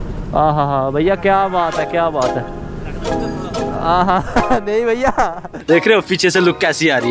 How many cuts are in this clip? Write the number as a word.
one